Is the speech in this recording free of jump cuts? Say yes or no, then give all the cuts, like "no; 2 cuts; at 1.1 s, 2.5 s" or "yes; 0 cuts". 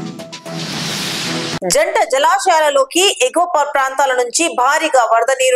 no; 1 cut; at 1.6 s